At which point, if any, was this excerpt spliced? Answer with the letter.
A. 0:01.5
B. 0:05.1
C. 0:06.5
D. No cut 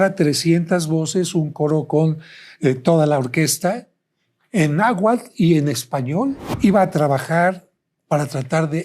C